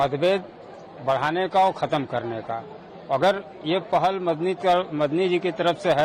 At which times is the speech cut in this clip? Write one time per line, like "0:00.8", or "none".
none